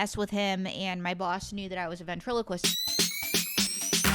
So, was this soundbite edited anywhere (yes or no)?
yes